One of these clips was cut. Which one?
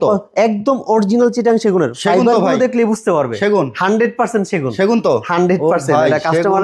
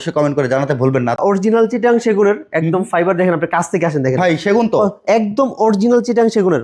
second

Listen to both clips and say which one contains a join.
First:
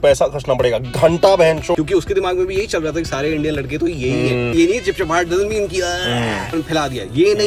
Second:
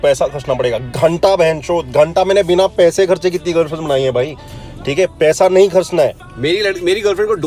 first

